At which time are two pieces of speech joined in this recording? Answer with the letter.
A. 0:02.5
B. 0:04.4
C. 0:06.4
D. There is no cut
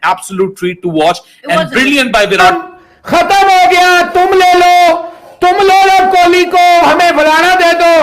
A